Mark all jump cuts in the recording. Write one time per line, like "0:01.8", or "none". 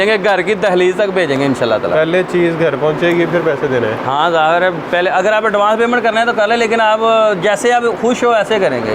none